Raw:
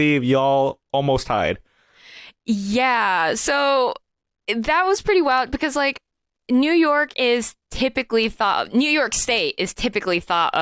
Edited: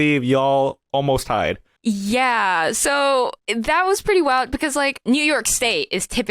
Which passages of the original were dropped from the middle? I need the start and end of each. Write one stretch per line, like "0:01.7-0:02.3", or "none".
0:01.7-0:02.3
0:04.0-0:04.4
0:06.0-0:08.7